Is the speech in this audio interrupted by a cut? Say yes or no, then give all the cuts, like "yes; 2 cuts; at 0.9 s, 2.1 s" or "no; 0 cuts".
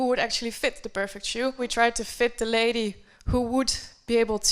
yes; 1 cut; at 1.7 s